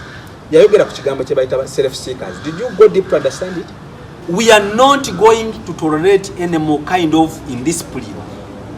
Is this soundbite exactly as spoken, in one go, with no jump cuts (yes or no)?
no